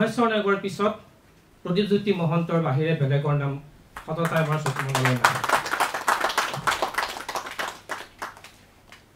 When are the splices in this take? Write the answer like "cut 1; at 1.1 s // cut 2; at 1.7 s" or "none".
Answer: none